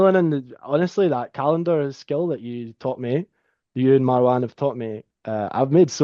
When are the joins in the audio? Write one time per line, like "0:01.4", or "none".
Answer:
none